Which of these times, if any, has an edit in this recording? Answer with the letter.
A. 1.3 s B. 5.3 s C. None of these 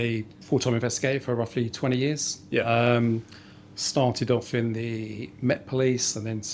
C